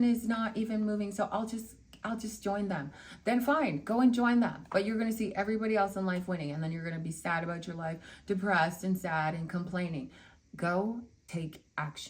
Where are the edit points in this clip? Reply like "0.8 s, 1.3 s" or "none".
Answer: 11.2 s